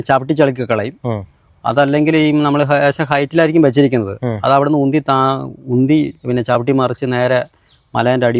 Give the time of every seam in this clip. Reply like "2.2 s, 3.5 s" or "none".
none